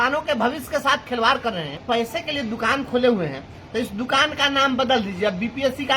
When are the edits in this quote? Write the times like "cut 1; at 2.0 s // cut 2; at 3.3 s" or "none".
cut 1; at 1.8 s